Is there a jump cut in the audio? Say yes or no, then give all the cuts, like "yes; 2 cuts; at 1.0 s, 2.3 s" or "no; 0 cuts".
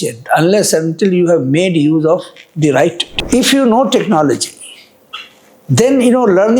yes; 1 cut; at 3.0 s